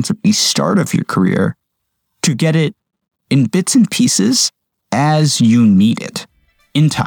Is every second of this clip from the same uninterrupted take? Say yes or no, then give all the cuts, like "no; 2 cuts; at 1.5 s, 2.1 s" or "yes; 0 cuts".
yes; 0 cuts